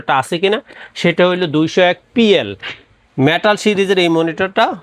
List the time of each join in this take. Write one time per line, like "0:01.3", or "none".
none

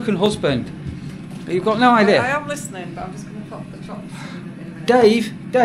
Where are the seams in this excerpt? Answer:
none

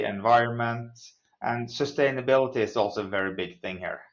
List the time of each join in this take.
none

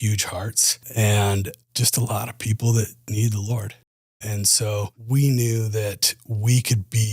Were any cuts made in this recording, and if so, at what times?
0:00.9
0:01.6
0:03.1
0:04.2
0:05.0

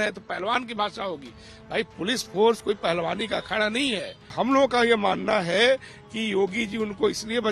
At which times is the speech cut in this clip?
0:04.2

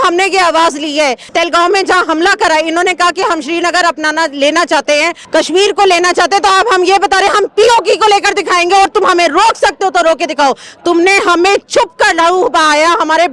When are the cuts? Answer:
0:01.3
0:05.2

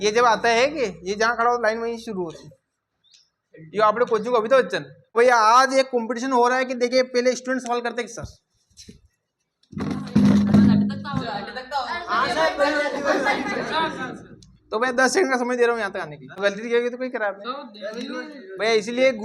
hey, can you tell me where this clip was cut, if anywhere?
0:05.2
0:16.3

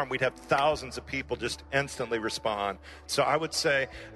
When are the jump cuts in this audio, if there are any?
0:03.0

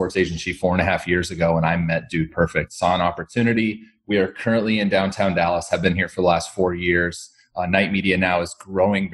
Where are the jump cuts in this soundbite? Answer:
none

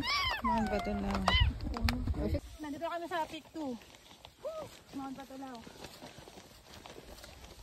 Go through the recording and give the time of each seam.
0:02.5

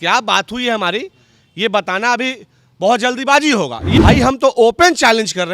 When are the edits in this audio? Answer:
0:03.8

